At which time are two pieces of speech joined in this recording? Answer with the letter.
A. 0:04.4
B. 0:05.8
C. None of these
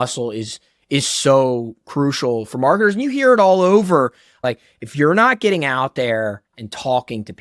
A